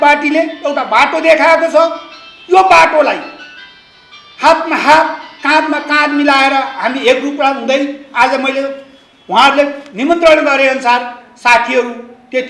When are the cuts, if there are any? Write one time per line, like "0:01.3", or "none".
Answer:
none